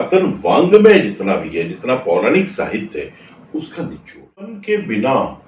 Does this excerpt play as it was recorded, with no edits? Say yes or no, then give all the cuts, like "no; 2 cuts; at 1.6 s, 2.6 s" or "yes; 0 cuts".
no; 1 cut; at 4.6 s